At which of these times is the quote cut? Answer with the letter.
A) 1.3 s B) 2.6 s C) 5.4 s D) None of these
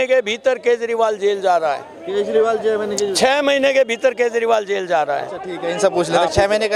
D